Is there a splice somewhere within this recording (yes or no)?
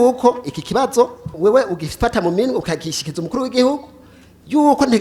yes